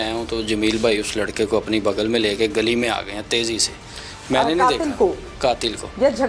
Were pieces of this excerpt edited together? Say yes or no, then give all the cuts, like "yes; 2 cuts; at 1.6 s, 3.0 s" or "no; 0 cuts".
no; 0 cuts